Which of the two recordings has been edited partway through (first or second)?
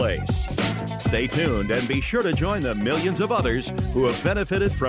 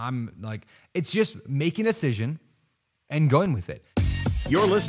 second